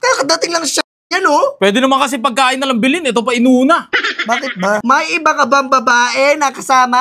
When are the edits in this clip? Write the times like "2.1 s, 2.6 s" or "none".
4.8 s